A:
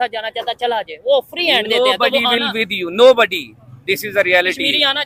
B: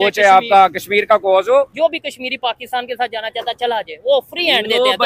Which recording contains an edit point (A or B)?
B